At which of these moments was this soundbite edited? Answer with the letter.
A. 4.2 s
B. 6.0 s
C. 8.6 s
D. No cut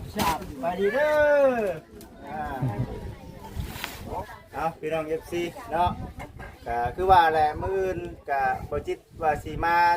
A